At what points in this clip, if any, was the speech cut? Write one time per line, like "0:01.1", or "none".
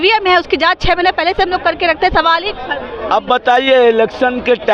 none